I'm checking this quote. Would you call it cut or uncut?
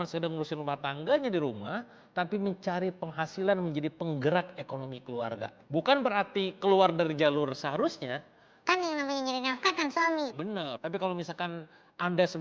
uncut